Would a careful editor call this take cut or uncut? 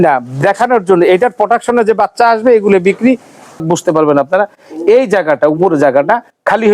cut